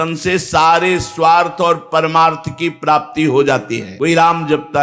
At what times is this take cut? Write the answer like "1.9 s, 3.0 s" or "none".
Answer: 3.8 s